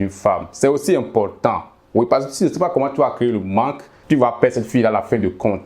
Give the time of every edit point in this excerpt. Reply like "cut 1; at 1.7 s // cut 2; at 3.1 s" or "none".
cut 1; at 3.9 s

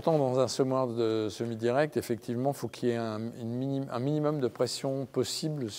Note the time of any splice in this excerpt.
none

